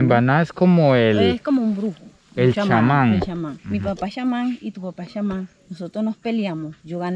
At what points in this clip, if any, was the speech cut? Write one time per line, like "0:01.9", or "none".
none